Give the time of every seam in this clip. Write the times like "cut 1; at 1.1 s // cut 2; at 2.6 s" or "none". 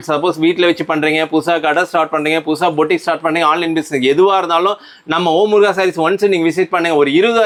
none